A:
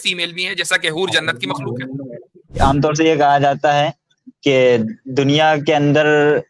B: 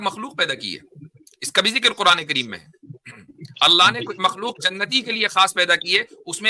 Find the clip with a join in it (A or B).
A